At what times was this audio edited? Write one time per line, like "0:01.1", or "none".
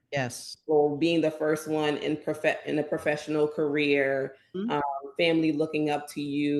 none